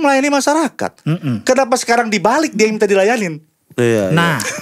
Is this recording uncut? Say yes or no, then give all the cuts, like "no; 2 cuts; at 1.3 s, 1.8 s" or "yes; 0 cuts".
yes; 0 cuts